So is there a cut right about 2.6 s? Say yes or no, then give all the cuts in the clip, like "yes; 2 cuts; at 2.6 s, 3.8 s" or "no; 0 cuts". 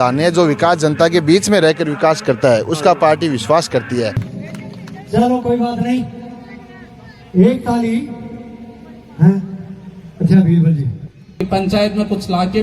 no; 2 cuts; at 4.3 s, 11.4 s